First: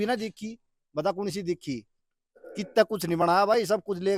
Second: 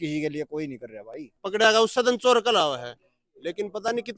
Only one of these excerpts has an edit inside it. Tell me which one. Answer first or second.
second